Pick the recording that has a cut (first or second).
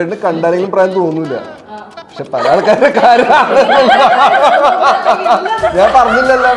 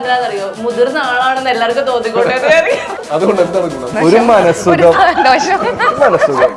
second